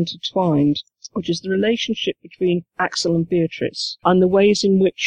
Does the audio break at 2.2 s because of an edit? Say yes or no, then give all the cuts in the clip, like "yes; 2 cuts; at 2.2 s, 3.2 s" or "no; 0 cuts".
no; 1 cut; at 4.0 s